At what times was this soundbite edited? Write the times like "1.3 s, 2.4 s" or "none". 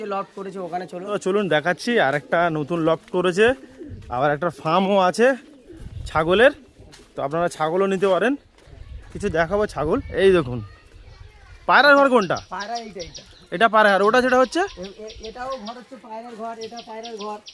1.2 s